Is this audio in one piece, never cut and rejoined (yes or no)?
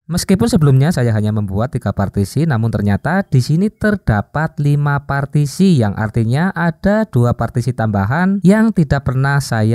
yes